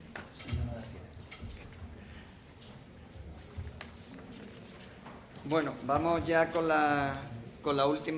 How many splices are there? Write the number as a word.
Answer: zero